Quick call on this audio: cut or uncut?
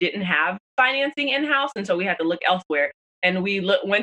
uncut